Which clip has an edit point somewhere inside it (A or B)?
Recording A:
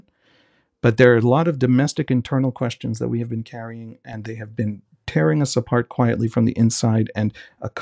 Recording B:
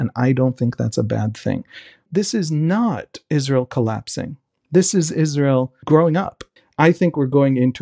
B